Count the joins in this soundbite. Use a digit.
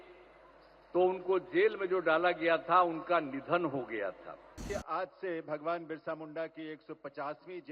1